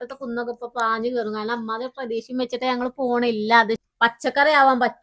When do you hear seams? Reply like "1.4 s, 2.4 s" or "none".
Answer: 3.8 s